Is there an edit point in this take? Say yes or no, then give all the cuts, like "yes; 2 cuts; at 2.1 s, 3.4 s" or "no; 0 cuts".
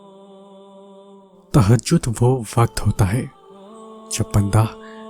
yes; 1 cut; at 1.0 s